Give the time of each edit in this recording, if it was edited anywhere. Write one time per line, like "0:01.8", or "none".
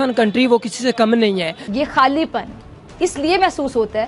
0:01.6